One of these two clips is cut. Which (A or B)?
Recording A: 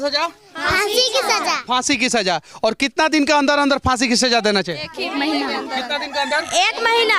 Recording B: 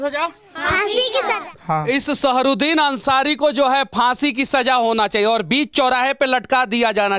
B